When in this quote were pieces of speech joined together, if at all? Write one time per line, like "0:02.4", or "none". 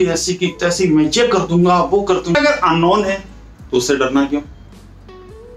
0:02.3